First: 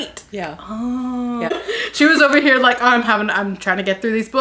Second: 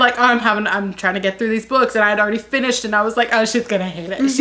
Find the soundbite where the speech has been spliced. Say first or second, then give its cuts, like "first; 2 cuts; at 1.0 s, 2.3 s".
first; 1 cut; at 1.6 s